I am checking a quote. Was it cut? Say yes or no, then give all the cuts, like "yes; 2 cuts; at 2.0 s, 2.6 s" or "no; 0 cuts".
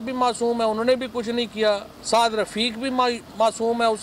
no; 0 cuts